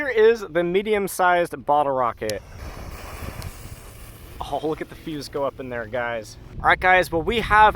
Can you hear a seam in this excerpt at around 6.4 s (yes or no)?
yes